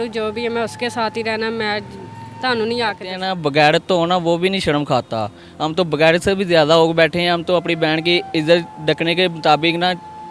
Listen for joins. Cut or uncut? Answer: cut